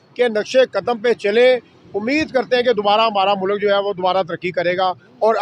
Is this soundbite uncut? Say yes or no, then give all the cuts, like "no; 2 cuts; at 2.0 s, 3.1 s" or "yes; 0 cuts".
yes; 0 cuts